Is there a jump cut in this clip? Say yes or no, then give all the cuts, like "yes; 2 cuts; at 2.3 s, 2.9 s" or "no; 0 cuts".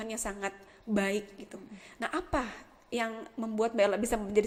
no; 0 cuts